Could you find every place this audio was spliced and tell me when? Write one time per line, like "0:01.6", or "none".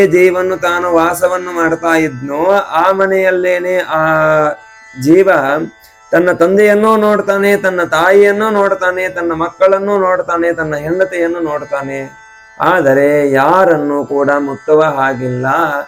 none

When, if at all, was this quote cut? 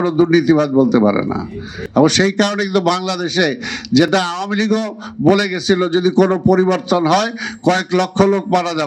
none

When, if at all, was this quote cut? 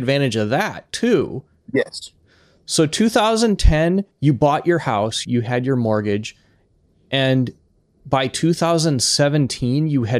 0:04.1
0:05.2

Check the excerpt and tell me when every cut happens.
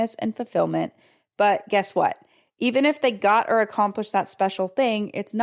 none

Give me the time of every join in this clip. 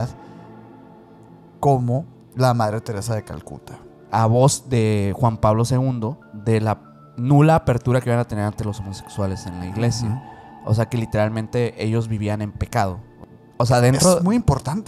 0:04.1
0:06.2
0:13.1

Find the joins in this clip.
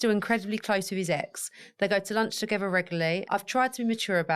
0:03.2

